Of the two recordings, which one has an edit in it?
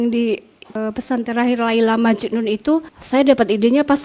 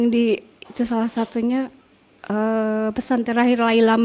first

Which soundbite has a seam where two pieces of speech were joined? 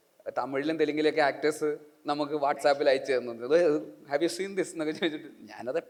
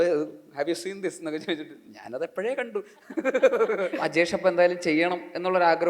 second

